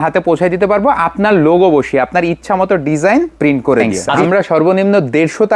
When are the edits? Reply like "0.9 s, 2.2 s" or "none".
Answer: 4.2 s